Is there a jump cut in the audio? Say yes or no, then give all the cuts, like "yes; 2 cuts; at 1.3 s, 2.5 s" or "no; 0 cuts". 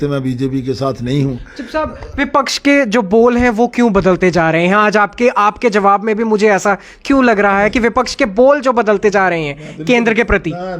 no; 0 cuts